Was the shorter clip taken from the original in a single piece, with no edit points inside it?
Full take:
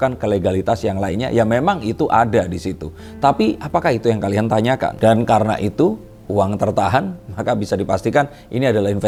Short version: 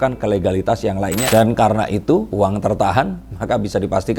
no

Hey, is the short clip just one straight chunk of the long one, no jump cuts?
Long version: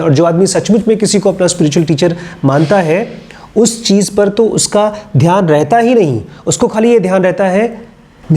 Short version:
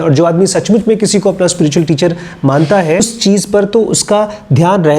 no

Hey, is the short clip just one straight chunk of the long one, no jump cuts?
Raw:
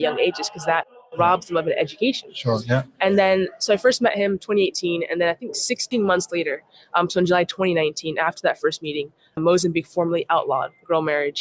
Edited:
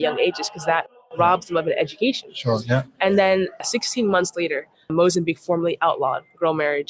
no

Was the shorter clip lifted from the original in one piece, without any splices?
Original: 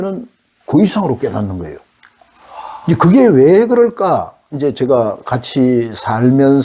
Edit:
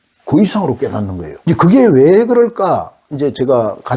no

